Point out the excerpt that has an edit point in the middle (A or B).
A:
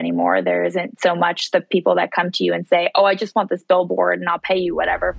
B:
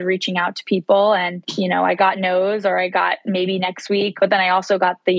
B